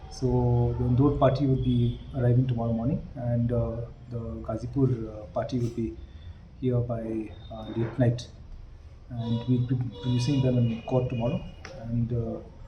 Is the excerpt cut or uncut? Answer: uncut